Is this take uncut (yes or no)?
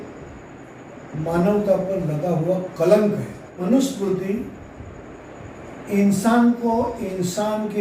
no